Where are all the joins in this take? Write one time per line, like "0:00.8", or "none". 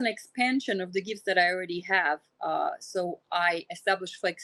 none